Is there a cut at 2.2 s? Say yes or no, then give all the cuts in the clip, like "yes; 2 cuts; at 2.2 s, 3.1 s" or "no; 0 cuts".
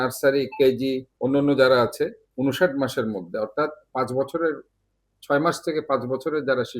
yes; 2 cuts; at 1.1 s, 2.2 s